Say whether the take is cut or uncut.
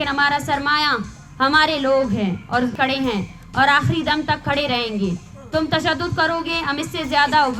cut